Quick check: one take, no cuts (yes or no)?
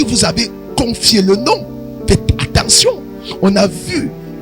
yes